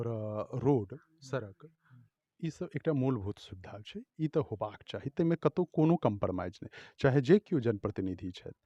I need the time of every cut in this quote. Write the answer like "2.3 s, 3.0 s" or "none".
none